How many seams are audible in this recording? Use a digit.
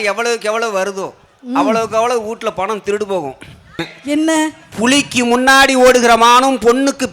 1